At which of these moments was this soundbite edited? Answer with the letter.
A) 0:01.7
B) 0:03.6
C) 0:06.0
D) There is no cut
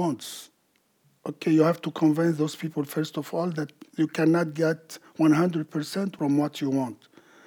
D